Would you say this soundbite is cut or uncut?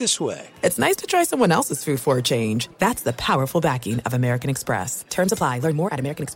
uncut